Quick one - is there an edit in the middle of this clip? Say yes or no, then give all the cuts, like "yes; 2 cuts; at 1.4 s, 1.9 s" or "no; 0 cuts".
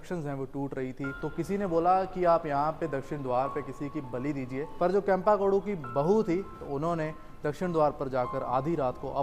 yes; 3 cuts; at 1.2 s, 4.7 s, 6.6 s